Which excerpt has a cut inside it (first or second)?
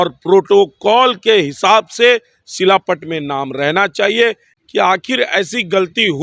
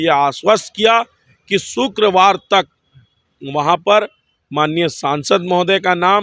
first